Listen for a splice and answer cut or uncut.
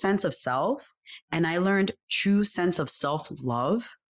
uncut